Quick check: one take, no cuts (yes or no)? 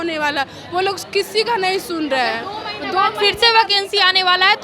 yes